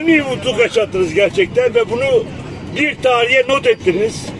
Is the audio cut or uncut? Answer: uncut